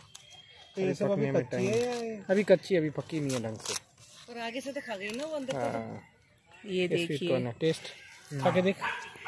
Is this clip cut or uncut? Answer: uncut